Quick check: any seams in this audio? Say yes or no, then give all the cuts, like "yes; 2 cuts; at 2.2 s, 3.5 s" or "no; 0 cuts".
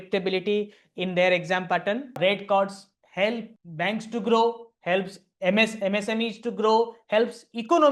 yes; 2 cuts; at 2.2 s, 3.6 s